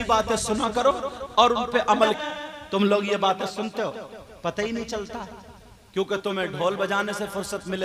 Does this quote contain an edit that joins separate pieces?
yes; 1 cut; at 2.2 s

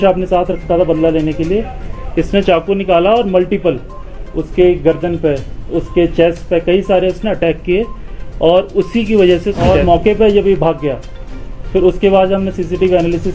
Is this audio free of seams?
no; 1 cut; at 9.7 s

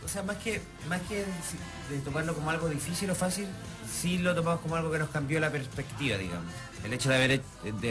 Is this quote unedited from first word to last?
yes; 0 cuts

